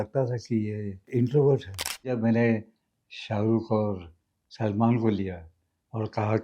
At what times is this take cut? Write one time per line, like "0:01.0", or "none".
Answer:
0:01.0
0:02.1